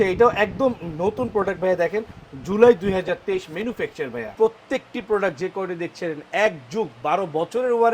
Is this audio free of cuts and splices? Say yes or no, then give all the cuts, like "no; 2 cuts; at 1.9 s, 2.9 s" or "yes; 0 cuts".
no; 1 cut; at 4.2 s